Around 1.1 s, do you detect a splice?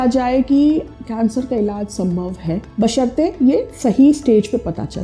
no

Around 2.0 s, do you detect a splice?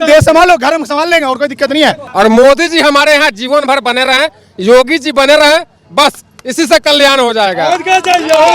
yes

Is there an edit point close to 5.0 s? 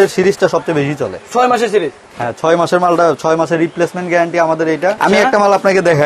yes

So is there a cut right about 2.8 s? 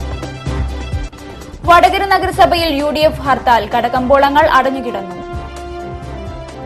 no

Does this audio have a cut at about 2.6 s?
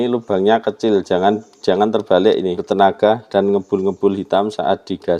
yes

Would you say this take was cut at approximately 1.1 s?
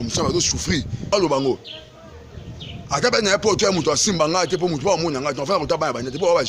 yes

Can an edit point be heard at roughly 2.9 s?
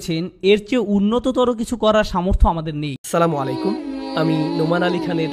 yes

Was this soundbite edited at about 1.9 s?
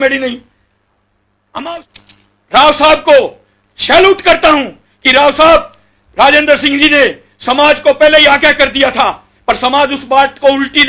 yes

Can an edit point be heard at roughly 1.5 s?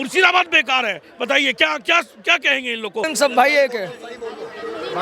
no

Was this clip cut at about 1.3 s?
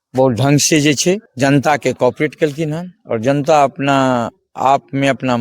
yes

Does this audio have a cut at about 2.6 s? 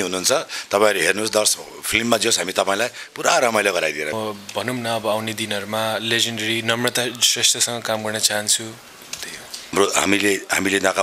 no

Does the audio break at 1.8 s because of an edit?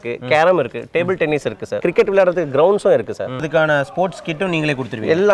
yes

